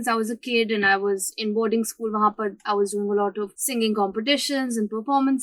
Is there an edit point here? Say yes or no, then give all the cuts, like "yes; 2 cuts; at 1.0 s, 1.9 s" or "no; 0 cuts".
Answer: yes; 1 cut; at 3.6 s